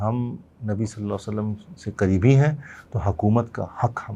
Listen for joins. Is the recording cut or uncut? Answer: uncut